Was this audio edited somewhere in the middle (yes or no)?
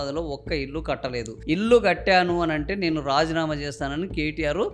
no